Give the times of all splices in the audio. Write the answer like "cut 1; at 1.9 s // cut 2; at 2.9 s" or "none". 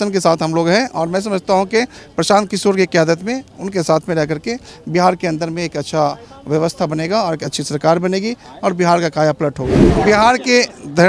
cut 1; at 9.9 s